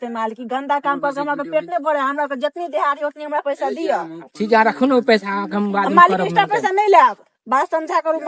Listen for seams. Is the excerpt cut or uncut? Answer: uncut